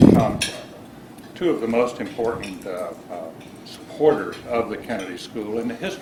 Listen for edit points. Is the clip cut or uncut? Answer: uncut